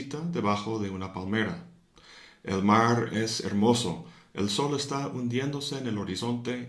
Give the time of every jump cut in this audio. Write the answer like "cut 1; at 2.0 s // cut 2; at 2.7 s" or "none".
cut 1; at 1.1 s